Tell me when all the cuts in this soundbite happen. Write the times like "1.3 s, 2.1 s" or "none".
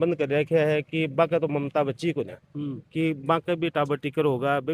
none